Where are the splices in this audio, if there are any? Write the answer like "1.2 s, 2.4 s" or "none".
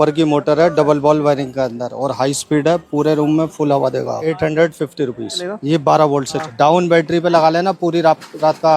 4.2 s, 5.4 s, 6.4 s